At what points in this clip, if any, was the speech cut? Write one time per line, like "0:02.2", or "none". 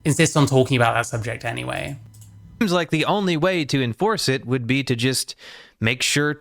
none